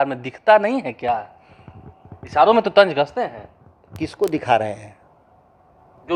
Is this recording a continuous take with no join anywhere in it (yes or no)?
yes